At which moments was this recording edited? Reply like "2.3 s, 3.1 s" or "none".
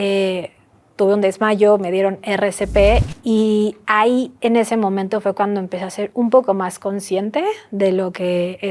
3.1 s